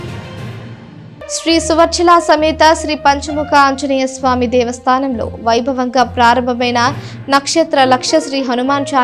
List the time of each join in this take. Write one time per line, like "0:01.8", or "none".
0:01.3